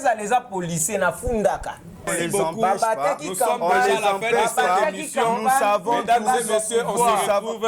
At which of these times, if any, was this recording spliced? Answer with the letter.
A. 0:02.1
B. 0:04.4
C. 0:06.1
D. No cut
A